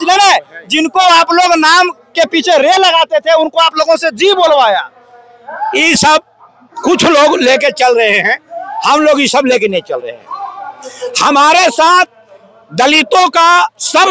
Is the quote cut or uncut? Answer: uncut